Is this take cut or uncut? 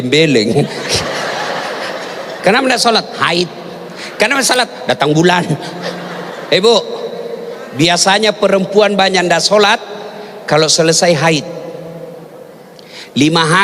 cut